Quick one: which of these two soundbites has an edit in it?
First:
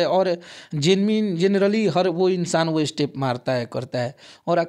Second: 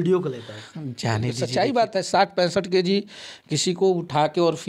second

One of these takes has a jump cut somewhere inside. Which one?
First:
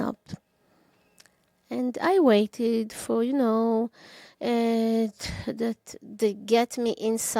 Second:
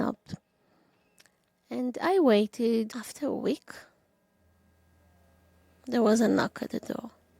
second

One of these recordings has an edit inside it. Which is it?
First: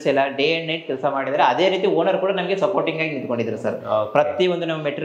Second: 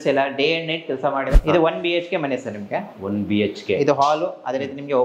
second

